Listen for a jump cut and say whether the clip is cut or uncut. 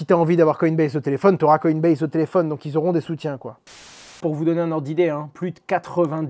cut